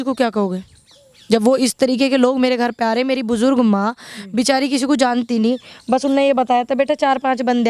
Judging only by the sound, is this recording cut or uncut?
uncut